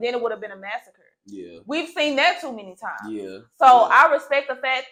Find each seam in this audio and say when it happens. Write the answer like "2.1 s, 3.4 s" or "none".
none